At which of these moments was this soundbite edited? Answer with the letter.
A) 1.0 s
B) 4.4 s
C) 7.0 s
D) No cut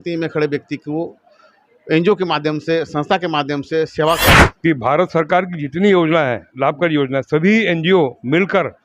B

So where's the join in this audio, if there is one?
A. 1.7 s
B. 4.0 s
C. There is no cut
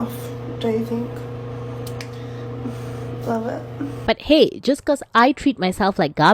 B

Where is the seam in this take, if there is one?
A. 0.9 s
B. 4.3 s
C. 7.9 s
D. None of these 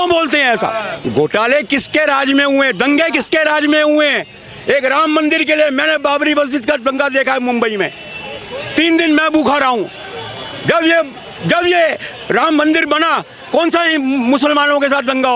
A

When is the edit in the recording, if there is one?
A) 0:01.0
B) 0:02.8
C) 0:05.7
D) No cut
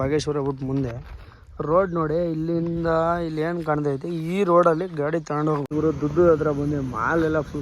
C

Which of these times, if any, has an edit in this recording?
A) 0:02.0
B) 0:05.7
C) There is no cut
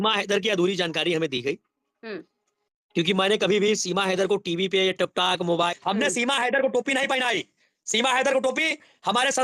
B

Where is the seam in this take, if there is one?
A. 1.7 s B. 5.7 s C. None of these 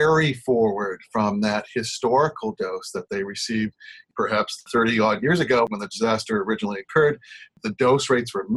B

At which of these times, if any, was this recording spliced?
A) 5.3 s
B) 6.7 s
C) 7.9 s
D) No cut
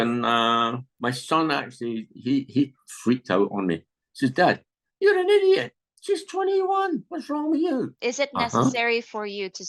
C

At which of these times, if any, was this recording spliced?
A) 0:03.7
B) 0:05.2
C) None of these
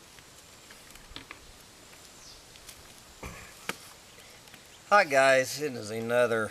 C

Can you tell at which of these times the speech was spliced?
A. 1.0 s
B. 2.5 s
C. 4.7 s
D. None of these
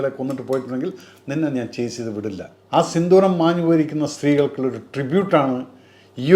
B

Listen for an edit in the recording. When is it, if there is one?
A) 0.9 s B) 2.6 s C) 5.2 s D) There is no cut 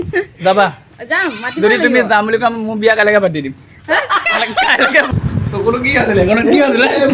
C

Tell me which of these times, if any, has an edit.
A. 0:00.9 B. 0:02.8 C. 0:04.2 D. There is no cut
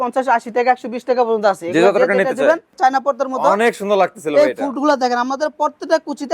B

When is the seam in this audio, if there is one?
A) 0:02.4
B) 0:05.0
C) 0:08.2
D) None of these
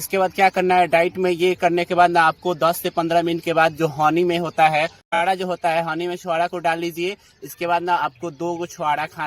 B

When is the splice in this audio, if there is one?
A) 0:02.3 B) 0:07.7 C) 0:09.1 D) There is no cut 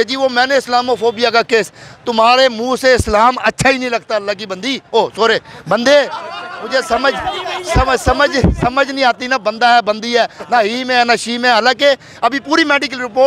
D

